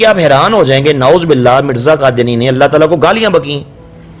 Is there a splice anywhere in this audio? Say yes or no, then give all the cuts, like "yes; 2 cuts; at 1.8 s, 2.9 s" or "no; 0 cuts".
no; 0 cuts